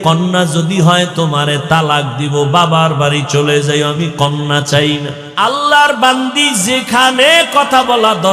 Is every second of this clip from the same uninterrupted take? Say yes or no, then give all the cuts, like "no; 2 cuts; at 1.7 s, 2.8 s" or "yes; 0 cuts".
no; 1 cut; at 5.2 s